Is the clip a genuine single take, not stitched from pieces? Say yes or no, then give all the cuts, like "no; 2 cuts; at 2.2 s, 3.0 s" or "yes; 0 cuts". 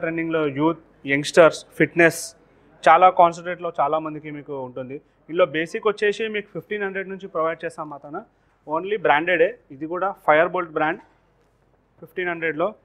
yes; 0 cuts